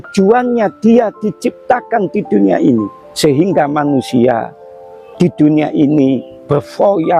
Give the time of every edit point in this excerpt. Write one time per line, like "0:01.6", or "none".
0:03.0